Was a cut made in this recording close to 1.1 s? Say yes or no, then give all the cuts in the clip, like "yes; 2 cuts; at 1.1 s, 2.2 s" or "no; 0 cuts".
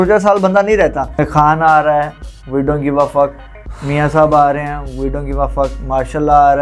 yes; 1 cut; at 1.1 s